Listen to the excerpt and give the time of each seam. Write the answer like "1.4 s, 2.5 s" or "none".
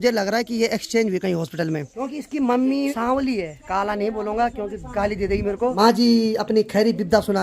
1.9 s, 3.0 s, 5.7 s